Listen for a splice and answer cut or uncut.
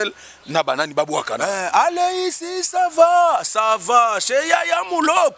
uncut